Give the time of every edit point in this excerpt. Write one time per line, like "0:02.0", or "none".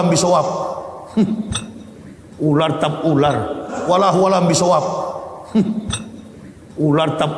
0:03.8